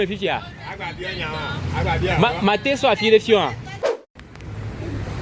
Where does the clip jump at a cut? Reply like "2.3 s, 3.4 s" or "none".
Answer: 4.0 s